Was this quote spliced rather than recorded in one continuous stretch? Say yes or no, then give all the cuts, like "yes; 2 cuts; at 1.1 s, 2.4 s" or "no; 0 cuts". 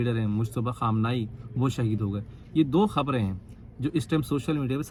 no; 0 cuts